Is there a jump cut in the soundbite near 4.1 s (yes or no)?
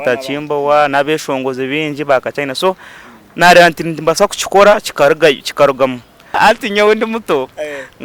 no